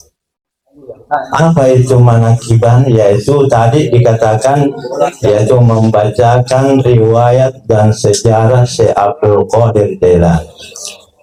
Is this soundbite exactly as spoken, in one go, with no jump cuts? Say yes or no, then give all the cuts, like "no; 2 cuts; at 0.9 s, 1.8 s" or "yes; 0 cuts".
yes; 0 cuts